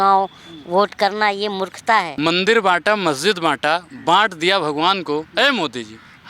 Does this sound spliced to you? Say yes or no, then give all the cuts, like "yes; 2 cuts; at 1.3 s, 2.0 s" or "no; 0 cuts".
yes; 1 cut; at 2.2 s